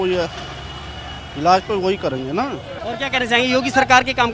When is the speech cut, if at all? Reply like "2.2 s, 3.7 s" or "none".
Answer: none